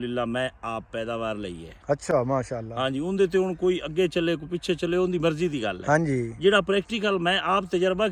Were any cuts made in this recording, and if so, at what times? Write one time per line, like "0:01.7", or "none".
none